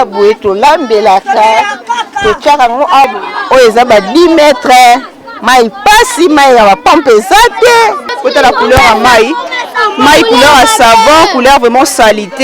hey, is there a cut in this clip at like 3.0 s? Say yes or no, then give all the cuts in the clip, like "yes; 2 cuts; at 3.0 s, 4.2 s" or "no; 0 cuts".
yes; 2 cuts; at 3.0 s, 8.1 s